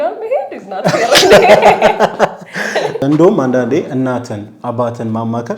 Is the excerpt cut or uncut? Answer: cut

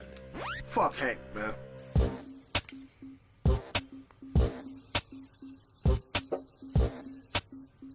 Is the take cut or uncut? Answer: uncut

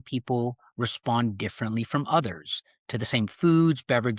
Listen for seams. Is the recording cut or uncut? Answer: uncut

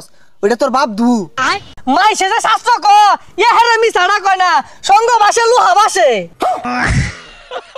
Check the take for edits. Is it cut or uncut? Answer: cut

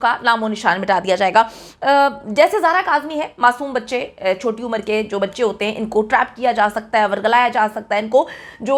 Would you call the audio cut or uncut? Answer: uncut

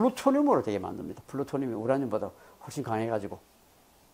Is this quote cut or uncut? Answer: uncut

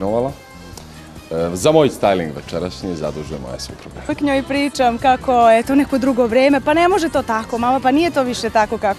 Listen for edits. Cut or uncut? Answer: cut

